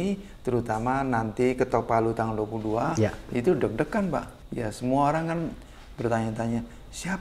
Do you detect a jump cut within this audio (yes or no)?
yes